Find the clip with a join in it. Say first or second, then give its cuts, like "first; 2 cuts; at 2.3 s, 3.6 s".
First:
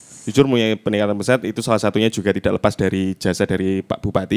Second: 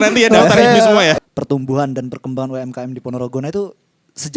second; 1 cut; at 1.2 s